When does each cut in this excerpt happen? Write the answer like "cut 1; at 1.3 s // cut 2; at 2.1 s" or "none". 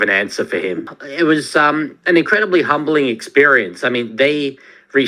cut 1; at 1.0 s